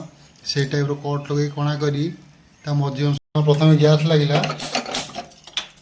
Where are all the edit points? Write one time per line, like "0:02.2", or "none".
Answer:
0:03.2

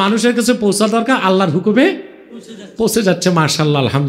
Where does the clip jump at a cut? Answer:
none

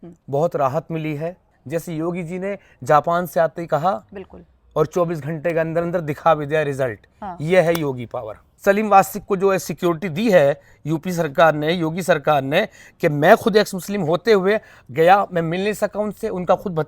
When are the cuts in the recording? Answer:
0:01.5
0:08.4

